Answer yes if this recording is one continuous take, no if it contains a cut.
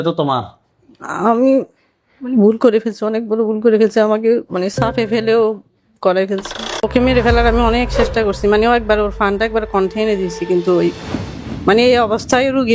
no